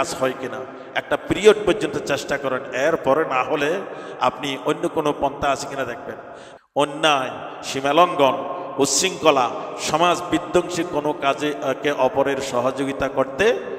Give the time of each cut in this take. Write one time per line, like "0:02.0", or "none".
0:06.4